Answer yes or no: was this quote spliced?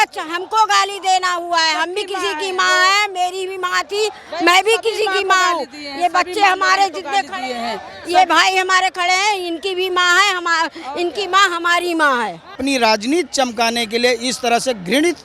yes